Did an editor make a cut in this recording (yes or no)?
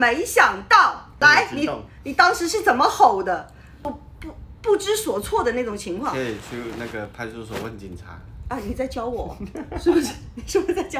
yes